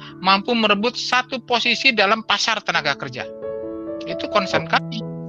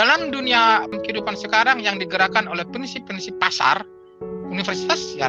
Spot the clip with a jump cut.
second; 1 cut; at 1.0 s

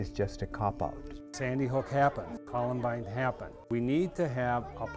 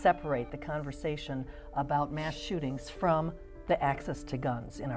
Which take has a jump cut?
first; 3 cuts; at 1.3 s, 2.4 s, 3.7 s

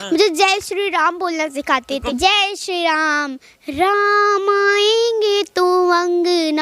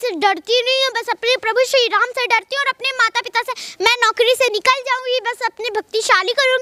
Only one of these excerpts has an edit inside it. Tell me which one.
first; 1 cut; at 2.1 s

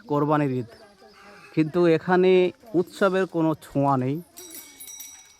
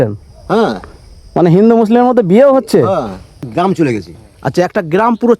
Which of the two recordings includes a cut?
second; 1 cut; at 3.4 s

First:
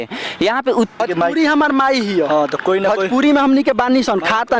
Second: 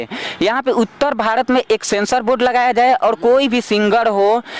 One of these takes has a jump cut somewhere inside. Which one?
first; 1 cut; at 1.0 s

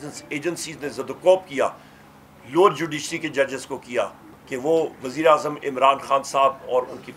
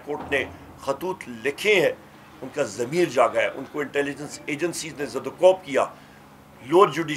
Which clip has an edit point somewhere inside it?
first; 1 cut; at 4.2 s

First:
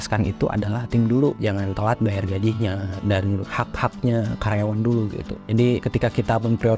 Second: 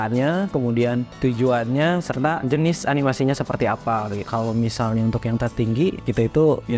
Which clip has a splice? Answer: first; 3 cuts; at 1.4 s, 3.3 s, 5.5 s

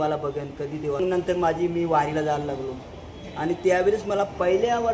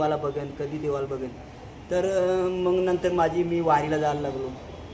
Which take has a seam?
first; 1 cut; at 1.0 s

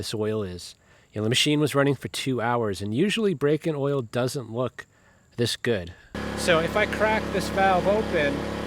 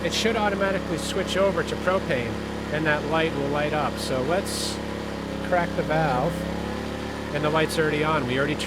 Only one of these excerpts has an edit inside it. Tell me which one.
first; 1 cut; at 6.1 s

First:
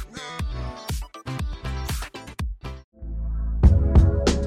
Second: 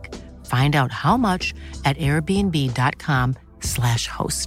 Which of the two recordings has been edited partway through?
first; 1 cut; at 2.9 s

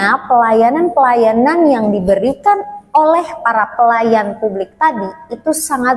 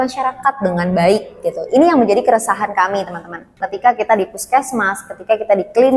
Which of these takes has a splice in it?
second; 1 cut; at 3.6 s

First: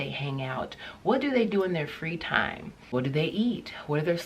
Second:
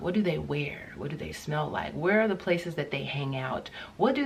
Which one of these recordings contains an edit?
first; 1 cut; at 2.7 s

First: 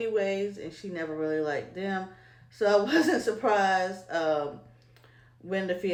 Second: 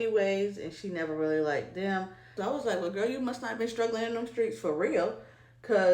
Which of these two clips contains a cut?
second; 1 cut; at 2.3 s

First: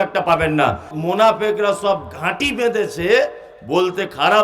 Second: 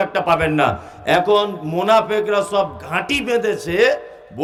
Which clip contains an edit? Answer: first; 1 cut; at 0.9 s

